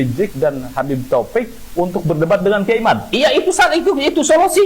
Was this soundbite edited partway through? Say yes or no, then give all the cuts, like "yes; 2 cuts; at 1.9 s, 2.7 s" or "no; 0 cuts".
no; 0 cuts